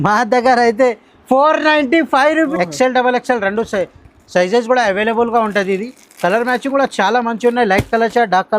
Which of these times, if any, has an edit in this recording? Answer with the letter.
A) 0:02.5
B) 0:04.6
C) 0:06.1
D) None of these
A